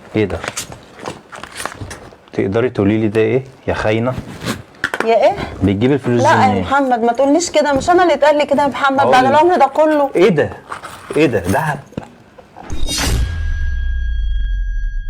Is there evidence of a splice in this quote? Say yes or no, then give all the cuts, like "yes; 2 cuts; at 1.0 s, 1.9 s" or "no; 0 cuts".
yes; 1 cut; at 12.9 s